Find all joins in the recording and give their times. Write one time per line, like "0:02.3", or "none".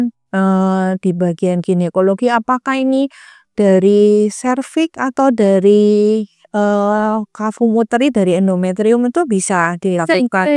none